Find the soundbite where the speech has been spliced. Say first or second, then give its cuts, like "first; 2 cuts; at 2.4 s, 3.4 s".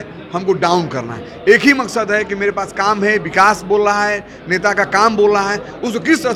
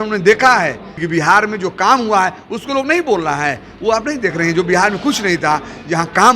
second; 1 cut; at 0.9 s